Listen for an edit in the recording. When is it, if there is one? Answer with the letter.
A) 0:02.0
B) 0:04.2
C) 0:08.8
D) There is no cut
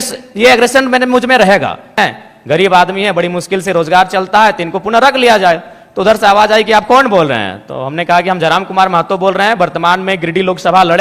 A